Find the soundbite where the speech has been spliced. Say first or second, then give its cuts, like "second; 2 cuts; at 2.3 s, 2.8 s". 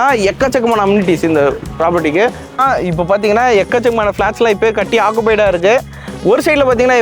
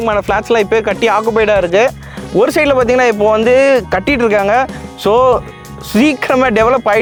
first; 1 cut; at 2.6 s